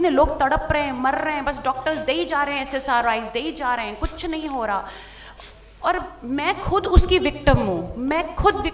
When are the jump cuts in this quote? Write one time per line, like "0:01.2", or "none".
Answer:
none